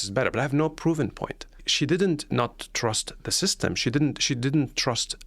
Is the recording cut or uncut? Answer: cut